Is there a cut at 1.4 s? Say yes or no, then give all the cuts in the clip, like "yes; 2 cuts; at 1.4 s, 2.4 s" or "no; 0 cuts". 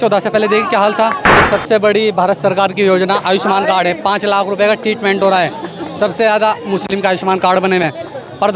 yes; 1 cut; at 1.4 s